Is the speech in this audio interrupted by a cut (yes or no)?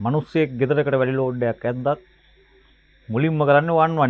no